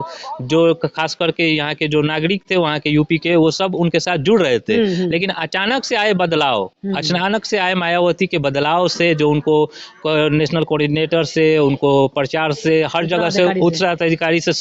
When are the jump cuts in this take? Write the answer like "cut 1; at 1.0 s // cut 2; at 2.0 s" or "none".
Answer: none